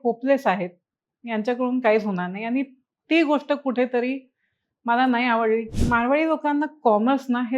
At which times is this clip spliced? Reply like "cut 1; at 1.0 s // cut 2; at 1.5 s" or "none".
cut 1; at 5.7 s

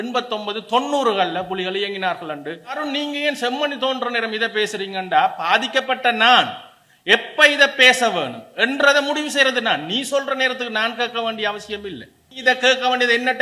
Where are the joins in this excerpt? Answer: cut 1; at 2.8 s // cut 2; at 12.4 s

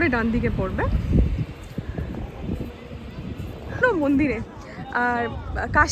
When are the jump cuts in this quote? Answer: cut 1; at 3.8 s

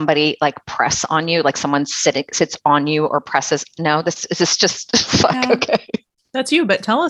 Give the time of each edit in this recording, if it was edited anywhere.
cut 1; at 6.2 s

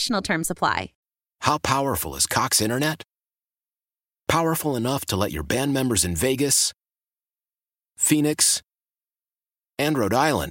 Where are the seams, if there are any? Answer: cut 1; at 0.9 s

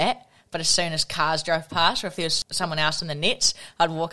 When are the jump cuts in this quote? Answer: cut 1; at 2.4 s

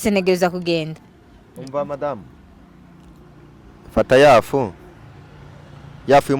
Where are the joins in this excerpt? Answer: cut 1; at 1.0 s

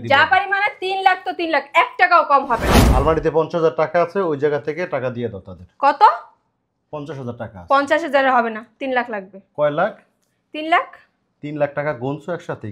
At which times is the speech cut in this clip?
cut 1; at 2.8 s

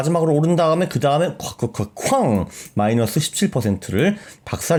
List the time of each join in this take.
none

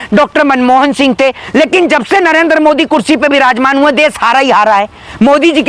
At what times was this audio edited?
none

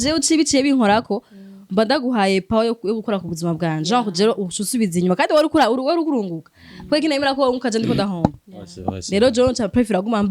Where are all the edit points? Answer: none

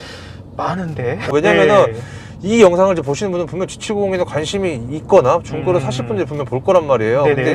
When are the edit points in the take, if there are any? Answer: cut 1; at 1.3 s

